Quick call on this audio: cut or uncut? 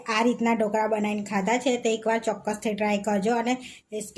uncut